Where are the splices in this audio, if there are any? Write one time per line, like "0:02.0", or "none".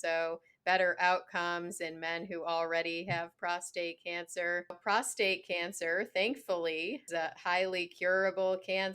0:04.8
0:07.1